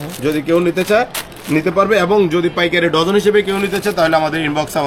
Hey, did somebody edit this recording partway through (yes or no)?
no